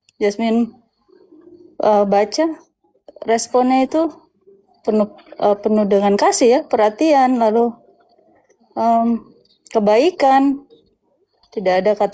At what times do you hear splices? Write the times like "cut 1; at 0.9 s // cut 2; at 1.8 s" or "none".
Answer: none